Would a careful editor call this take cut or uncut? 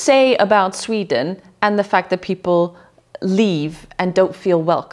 uncut